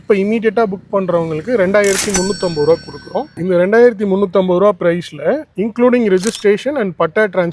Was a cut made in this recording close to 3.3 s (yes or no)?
yes